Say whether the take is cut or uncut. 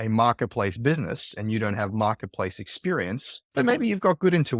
uncut